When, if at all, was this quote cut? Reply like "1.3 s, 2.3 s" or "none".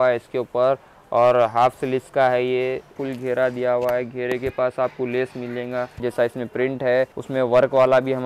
3.0 s, 6.0 s, 7.2 s